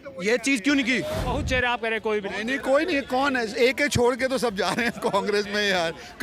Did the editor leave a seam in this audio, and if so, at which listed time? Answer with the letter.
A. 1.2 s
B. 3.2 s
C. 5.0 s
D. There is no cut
A